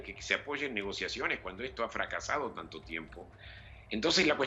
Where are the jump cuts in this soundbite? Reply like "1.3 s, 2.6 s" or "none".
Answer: 1.4 s

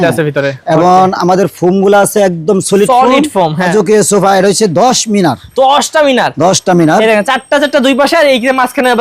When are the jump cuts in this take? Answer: 3.7 s

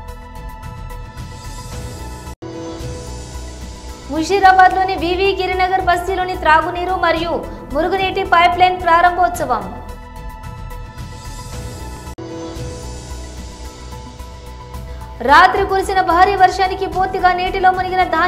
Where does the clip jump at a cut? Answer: 2.3 s, 4.0 s, 9.8 s, 11.9 s, 13.7 s, 15.2 s

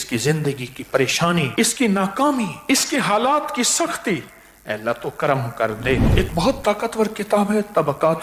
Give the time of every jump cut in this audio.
1.5 s, 2.6 s, 6.1 s

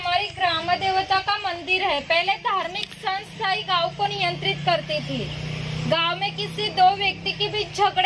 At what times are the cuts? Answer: none

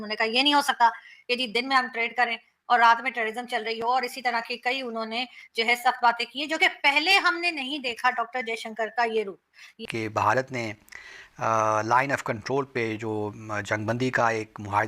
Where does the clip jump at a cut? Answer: 9.7 s

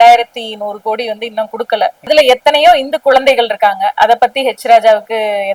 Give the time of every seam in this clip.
none

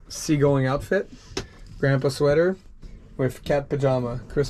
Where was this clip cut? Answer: none

